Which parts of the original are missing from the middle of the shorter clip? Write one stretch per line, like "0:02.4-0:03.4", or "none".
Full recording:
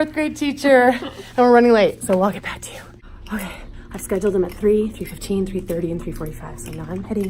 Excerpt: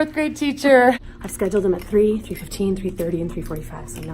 0:01.1-0:03.8